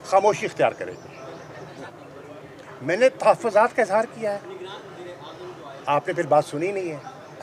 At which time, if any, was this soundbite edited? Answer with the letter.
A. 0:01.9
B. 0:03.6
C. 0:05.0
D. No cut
A